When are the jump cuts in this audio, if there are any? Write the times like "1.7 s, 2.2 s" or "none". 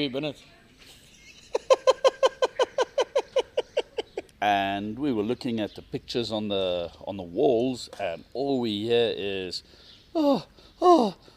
4.2 s